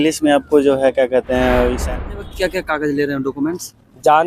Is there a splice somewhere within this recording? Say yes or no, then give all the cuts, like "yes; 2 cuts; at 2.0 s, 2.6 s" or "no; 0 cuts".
yes; 1 cut; at 1.9 s